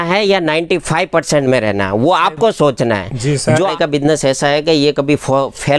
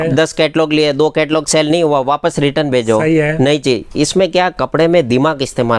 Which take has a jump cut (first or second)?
first